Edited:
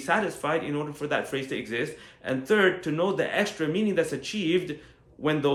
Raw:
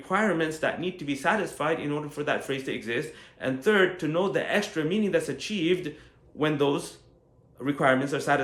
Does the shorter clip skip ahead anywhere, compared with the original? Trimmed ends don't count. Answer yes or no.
no